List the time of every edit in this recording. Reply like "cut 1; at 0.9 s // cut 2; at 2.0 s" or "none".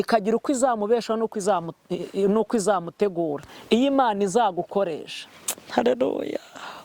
cut 1; at 3.5 s